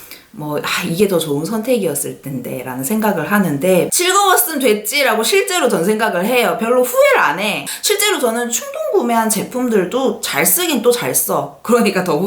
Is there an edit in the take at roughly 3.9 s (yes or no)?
yes